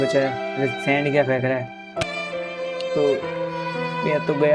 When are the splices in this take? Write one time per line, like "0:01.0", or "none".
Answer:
0:02.0